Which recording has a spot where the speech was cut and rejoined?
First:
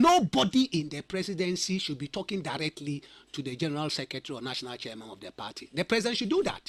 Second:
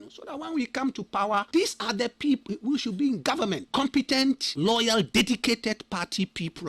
second; 4 cuts; at 1.5 s, 2.4 s, 3.6 s, 4.5 s

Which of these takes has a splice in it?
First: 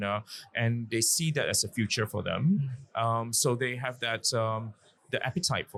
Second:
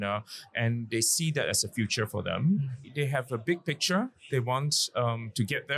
second; 1 cut; at 2.8 s

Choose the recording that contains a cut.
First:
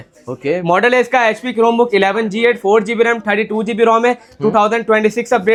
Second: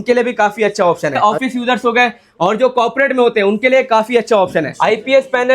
second; 2 cuts; at 1.2 s, 4.7 s

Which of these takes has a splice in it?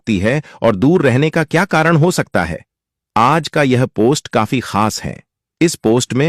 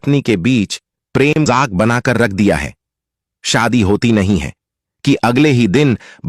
second; 1 cut; at 1.5 s

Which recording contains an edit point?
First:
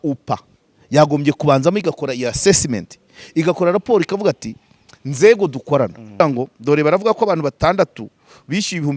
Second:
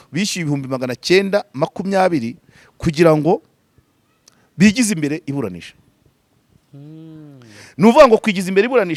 first; 1 cut; at 6.0 s

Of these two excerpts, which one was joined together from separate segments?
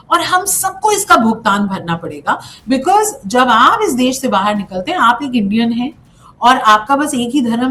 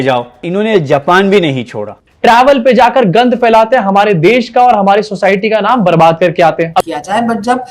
second; 2 cuts; at 2.0 s, 6.8 s

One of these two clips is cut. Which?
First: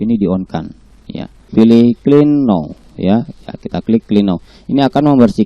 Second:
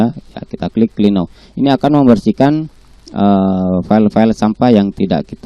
first; 1 cut; at 1.5 s

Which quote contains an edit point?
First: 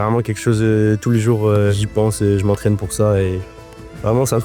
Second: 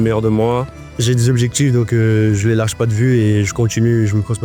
first; 1 cut; at 1.7 s

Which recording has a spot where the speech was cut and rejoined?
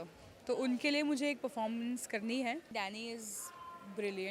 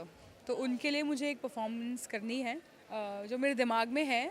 first; 1 cut; at 2.7 s

